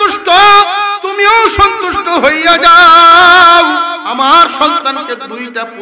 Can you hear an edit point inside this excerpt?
yes; 2 cuts; at 1.0 s, 4.0 s

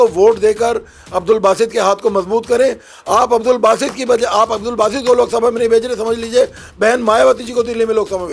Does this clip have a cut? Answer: no; 0 cuts

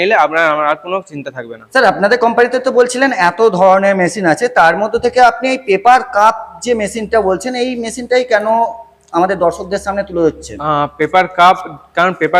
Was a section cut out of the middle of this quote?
no; 0 cuts

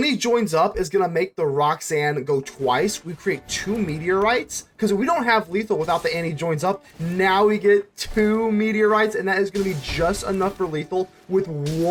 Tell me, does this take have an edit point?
no; 0 cuts

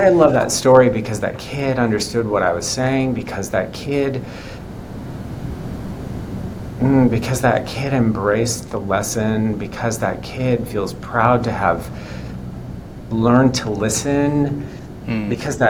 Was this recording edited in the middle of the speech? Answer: no; 0 cuts

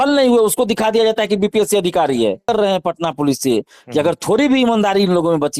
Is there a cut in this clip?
yes; 1 cut; at 2.5 s

